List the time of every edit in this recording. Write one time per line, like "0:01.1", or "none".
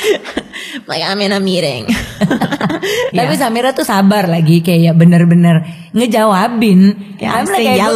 0:03.1